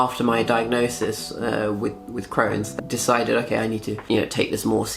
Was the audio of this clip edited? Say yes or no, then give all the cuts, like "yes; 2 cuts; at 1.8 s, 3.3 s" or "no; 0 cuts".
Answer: yes; 2 cuts; at 2.7 s, 4.0 s